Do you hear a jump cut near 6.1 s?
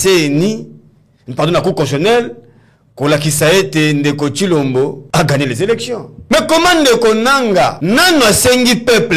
yes; 3 cuts; at 5.0 s, 6.1 s, 7.8 s

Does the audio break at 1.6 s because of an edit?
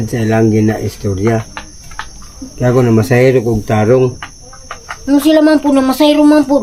no; 0 cuts

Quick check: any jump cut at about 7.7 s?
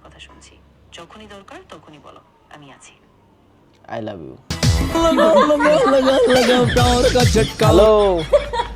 yes; 2 cuts; at 4.5 s, 7.7 s

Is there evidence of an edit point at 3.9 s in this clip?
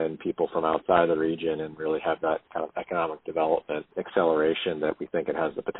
yes; 1 cut; at 3.9 s

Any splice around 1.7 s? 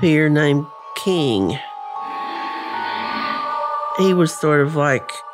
no; 0 cuts

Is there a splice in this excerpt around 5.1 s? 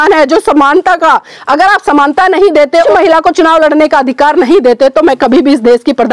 no; 1 cut; at 2.9 s

